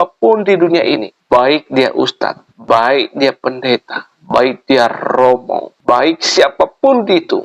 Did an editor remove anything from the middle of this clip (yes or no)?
yes